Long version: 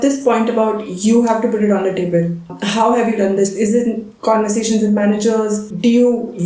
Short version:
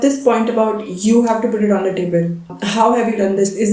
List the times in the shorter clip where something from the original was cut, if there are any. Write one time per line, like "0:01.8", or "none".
none